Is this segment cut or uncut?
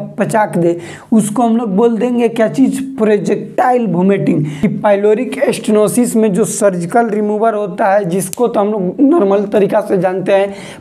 cut